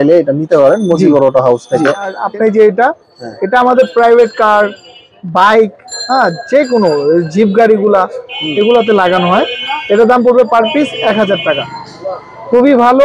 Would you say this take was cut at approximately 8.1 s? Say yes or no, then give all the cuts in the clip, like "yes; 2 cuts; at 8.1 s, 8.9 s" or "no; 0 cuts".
no; 1 cut; at 2.2 s